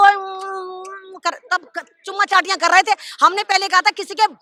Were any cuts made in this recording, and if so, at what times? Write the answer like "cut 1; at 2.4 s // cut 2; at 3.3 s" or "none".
none

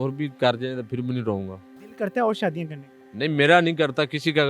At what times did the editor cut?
cut 1; at 1.8 s

